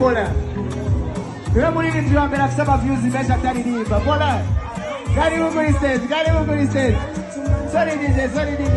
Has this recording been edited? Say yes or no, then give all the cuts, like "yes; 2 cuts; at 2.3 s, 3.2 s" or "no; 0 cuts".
no; 0 cuts